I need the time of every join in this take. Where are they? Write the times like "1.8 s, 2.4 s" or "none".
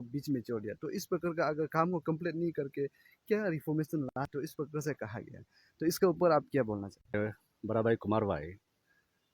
4.1 s, 7.1 s